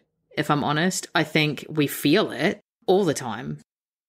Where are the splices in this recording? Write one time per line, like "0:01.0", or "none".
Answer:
0:02.7